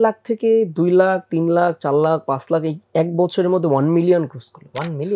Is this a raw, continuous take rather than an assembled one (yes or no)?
yes